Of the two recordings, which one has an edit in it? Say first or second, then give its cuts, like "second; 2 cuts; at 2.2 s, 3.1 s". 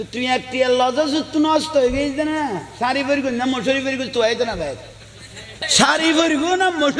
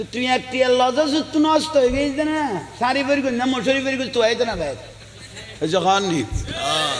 first; 1 cut; at 5.5 s